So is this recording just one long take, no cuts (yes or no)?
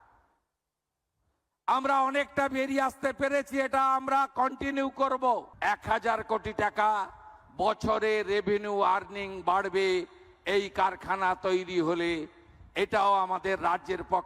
no